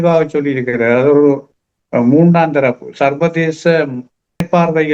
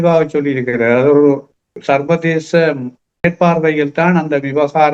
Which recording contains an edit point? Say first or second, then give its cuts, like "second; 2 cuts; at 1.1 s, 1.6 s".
second; 1 cut; at 1.7 s